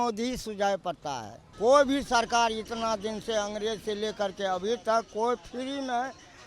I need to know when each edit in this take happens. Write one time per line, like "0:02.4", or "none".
0:01.5